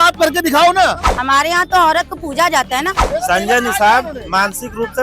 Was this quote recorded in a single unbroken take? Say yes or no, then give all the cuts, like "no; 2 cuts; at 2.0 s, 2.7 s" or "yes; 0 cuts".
no; 2 cuts; at 1.1 s, 3.0 s